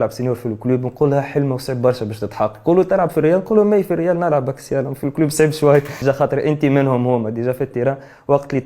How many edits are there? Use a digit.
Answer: 1